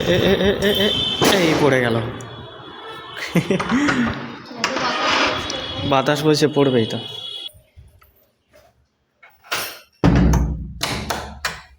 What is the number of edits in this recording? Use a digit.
0